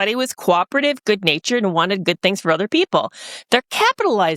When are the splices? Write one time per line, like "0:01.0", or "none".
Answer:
none